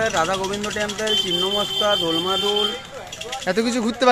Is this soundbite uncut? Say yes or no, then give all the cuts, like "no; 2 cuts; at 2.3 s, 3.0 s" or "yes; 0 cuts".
yes; 0 cuts